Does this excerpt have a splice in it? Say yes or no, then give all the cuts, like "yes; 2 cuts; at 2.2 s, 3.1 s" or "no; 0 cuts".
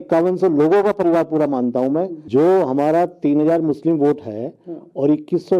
yes; 1 cut; at 2.2 s